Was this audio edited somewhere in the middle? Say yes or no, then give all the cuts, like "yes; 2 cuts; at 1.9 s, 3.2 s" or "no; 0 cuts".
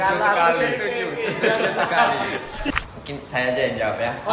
yes; 1 cut; at 2.7 s